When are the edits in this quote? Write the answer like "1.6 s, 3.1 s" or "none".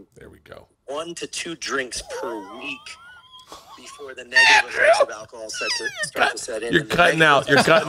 none